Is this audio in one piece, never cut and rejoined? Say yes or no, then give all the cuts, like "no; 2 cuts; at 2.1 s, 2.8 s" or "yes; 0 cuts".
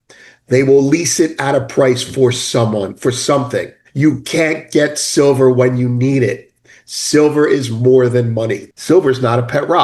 no; 2 cuts; at 3.8 s, 8.7 s